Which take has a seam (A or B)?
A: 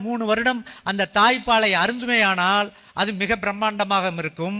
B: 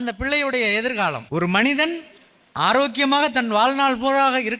B